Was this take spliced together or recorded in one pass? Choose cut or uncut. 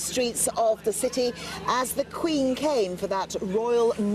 cut